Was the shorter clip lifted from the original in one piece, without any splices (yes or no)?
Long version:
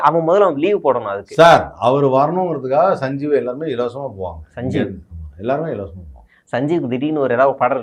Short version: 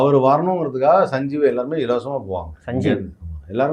yes